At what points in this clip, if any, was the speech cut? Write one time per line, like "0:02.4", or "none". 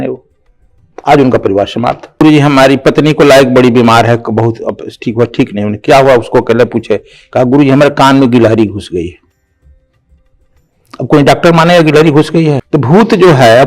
0:02.2
0:12.6

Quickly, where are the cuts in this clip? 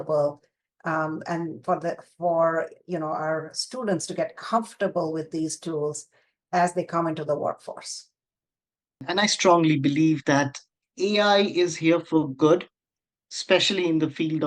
0:09.1

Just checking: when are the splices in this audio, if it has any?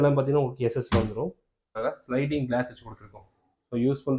0:01.7

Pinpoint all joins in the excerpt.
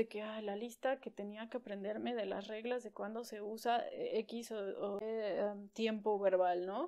0:02.6
0:05.0

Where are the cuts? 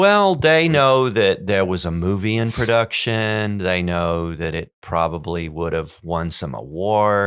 none

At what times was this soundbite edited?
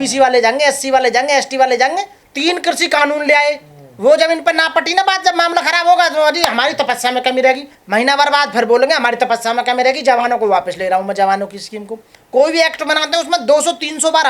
0:02.2
0:07.7
0:12.1

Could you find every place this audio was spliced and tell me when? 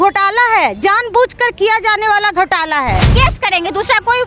0:03.1

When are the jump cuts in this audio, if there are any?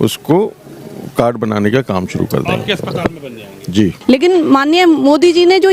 0:04.0

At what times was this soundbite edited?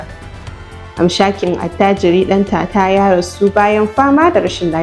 none

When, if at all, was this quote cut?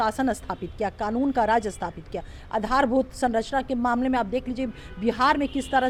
none

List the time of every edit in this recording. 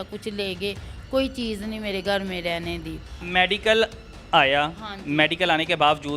0:03.2

